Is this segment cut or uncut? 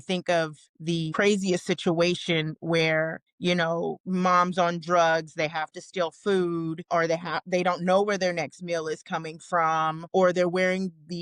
cut